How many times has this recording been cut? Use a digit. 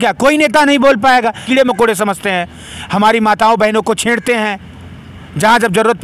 1